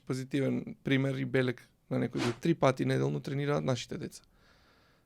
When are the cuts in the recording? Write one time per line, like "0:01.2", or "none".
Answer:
0:02.4